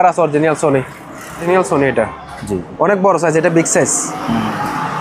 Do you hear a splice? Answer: yes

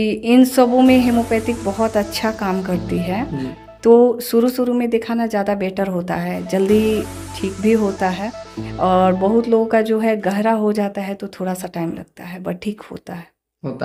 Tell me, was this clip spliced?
no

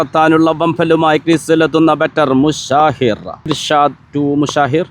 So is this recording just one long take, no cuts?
no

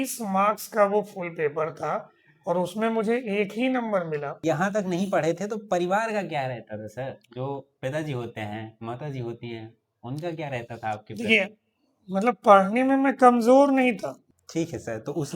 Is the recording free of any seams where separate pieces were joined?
no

